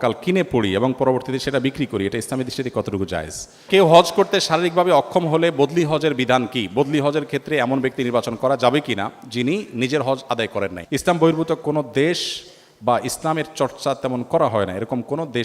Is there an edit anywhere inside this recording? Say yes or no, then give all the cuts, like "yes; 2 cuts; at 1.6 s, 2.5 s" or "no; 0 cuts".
yes; 2 cuts; at 3.6 s, 10.8 s